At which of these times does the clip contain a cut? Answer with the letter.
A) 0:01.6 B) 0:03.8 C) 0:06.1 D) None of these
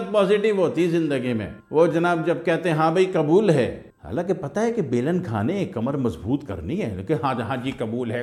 D